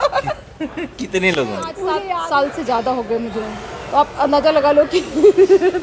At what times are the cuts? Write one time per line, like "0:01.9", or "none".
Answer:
0:02.0